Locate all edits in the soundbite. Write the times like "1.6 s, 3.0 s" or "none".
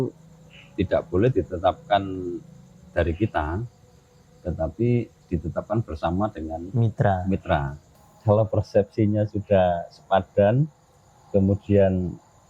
8.1 s